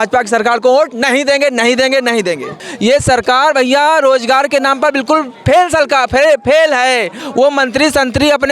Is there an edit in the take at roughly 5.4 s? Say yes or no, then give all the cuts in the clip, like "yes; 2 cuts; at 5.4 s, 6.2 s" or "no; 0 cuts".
no; 2 cuts; at 2.6 s, 7.2 s